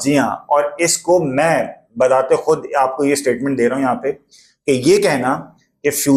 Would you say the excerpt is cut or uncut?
uncut